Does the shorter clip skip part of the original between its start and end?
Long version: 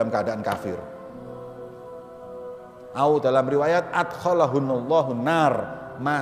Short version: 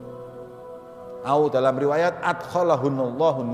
yes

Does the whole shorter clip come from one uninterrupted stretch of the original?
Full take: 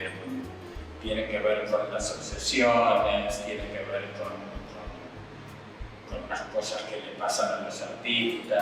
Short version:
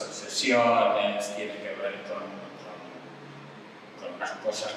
yes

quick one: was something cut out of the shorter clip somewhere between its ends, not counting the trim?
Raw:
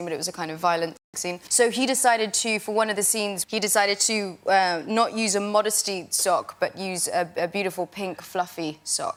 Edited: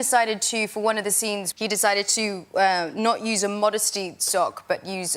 no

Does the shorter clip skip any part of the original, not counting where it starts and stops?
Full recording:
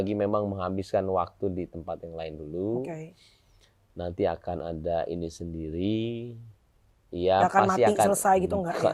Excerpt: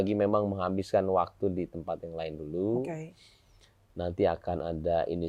no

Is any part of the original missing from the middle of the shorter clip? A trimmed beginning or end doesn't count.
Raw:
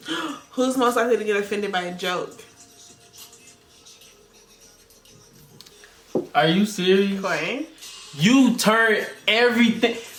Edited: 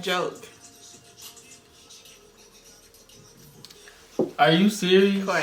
no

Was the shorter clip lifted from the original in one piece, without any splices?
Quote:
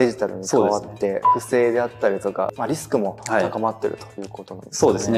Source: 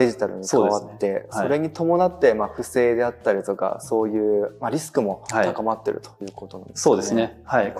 no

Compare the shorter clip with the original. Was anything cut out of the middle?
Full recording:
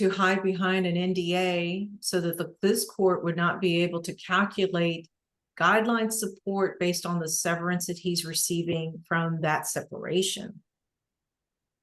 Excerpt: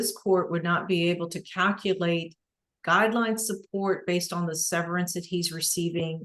no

